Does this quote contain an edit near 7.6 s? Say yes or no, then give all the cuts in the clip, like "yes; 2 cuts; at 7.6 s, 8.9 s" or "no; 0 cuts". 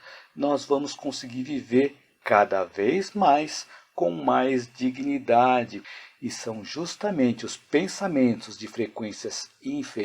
no; 1 cut; at 5.8 s